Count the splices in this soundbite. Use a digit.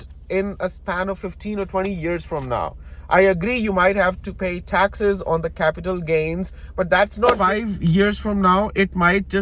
1